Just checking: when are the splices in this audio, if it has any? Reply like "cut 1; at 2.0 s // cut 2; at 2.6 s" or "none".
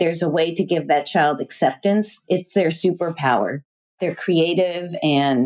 cut 1; at 3.9 s